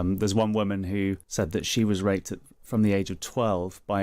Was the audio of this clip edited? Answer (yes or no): yes